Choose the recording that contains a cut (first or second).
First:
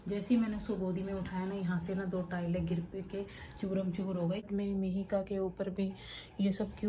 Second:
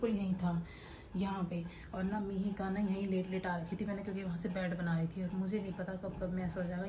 first